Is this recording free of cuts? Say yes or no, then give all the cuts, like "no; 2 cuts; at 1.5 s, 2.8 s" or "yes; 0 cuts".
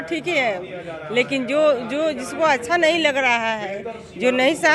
yes; 0 cuts